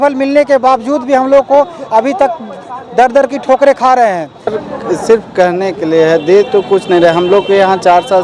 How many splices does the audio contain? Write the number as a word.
one